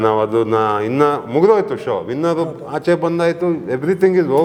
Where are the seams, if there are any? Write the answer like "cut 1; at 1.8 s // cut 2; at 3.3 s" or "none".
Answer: none